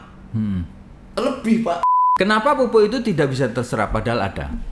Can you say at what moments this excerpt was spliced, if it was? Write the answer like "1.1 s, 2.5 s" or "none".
1.9 s